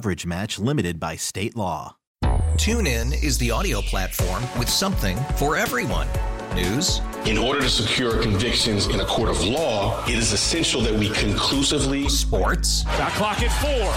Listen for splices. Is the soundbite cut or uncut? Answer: cut